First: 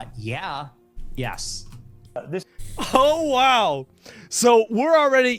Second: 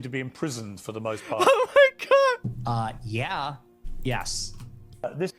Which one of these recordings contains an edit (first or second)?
second